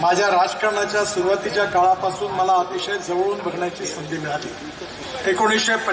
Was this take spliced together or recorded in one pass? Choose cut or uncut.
cut